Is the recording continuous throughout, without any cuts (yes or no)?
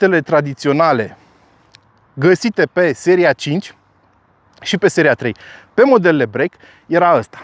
yes